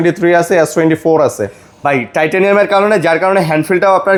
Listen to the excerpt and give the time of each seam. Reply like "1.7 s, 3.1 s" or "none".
none

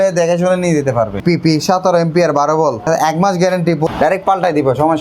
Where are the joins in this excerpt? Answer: 1.2 s, 2.9 s, 3.9 s

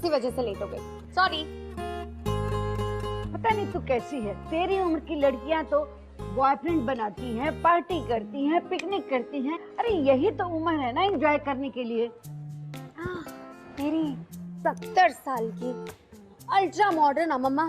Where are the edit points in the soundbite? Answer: 7.5 s

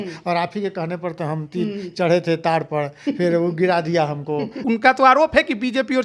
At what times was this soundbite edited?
4.6 s

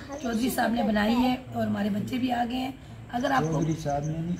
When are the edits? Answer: none

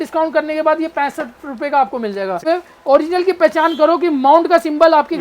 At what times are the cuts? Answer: 2.4 s

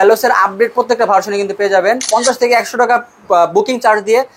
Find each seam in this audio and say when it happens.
2.1 s

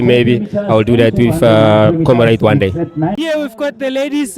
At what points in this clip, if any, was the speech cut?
3.2 s

